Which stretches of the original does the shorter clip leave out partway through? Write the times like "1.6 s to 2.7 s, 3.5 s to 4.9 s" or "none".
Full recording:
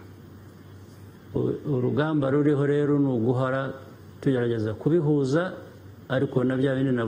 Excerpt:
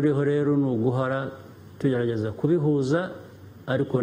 none